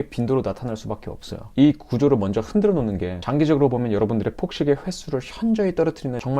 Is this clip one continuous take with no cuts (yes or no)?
no